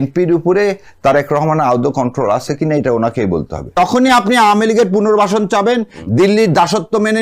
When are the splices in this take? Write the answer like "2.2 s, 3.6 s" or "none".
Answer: 3.8 s